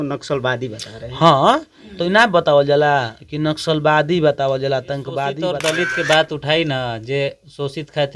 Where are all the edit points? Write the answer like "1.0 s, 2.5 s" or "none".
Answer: 5.4 s